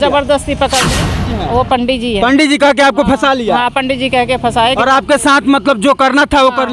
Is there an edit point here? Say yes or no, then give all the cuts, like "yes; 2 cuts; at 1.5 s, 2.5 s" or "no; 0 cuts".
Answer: yes; 1 cut; at 1.2 s